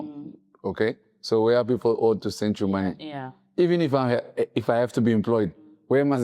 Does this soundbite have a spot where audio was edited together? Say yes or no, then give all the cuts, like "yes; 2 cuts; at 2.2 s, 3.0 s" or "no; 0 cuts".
no; 0 cuts